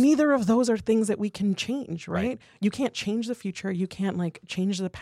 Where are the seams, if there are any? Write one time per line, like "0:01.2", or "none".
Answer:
none